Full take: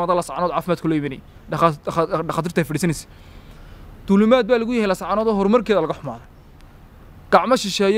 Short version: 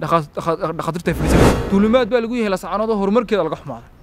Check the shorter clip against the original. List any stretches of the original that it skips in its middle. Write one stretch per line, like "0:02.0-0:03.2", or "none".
0:03.1-0:03.9